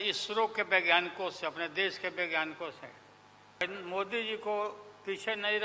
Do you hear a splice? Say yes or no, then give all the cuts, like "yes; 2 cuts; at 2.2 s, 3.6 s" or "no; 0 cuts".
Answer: yes; 1 cut; at 3.6 s